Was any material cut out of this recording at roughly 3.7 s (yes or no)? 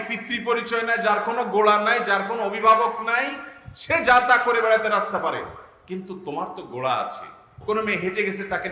no